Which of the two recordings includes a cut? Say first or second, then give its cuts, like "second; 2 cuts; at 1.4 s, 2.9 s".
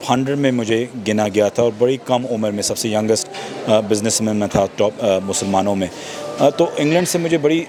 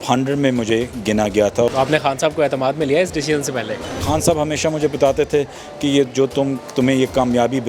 second; 2 cuts; at 1.7 s, 4.0 s